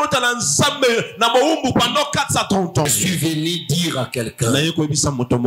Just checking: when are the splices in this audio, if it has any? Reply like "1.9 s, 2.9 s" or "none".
2.9 s